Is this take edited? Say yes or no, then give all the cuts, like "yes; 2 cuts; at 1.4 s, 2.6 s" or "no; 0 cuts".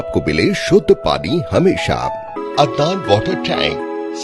yes; 1 cut; at 2.4 s